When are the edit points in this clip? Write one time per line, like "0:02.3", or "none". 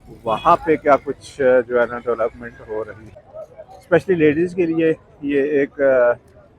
0:03.0